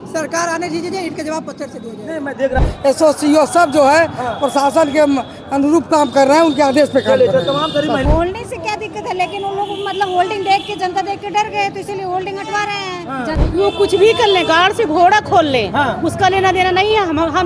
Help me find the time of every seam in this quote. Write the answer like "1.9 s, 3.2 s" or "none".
2.6 s, 8.0 s, 13.3 s